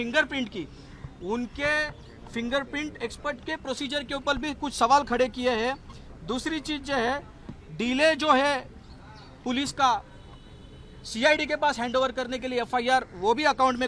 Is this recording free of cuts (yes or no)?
yes